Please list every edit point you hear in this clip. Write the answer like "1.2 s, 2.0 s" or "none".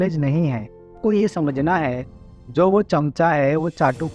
1.0 s